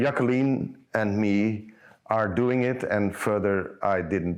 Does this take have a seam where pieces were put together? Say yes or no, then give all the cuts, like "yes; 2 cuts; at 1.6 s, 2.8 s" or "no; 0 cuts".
no; 0 cuts